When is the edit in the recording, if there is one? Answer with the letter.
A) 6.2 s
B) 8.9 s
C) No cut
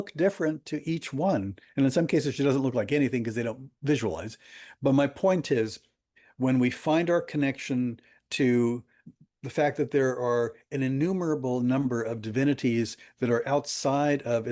C